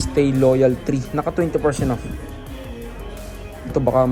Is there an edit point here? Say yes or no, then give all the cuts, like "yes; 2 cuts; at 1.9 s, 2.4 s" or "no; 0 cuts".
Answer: no; 0 cuts